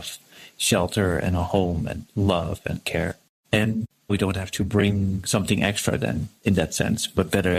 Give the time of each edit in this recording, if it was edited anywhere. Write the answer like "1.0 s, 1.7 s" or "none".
none